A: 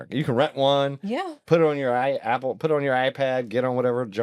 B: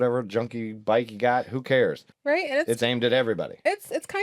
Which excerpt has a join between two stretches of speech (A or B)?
B